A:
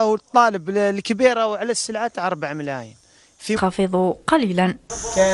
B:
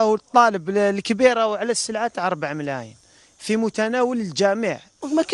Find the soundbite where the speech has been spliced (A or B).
B